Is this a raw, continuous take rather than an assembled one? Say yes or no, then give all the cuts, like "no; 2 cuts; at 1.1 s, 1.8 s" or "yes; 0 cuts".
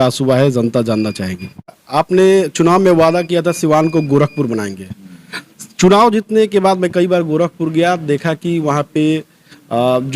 no; 1 cut; at 1.8 s